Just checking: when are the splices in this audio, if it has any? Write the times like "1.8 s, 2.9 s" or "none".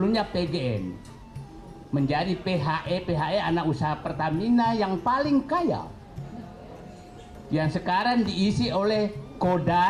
none